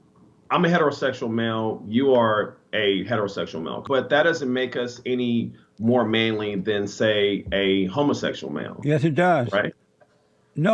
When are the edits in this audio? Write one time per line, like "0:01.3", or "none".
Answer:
0:03.8